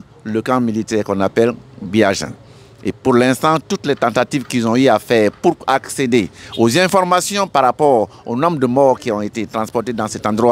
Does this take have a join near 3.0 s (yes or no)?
no